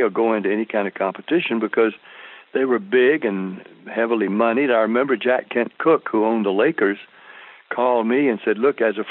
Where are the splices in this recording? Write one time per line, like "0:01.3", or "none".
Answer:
none